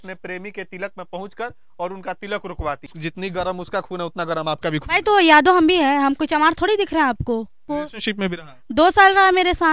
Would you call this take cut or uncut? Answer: cut